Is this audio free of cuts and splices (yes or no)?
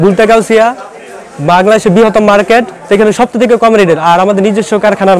yes